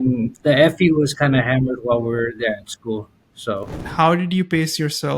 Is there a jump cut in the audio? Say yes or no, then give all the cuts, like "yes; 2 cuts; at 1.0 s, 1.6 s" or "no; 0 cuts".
yes; 1 cut; at 3.7 s